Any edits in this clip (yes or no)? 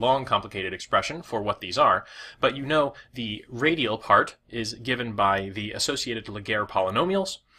no